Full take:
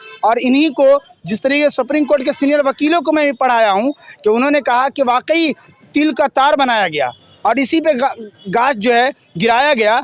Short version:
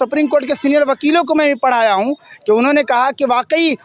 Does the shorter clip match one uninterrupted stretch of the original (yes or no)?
yes